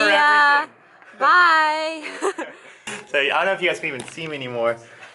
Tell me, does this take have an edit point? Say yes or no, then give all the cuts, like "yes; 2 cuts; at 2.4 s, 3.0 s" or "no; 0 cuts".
no; 0 cuts